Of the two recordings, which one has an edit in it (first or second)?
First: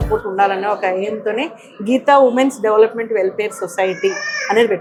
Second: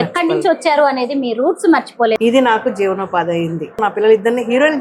second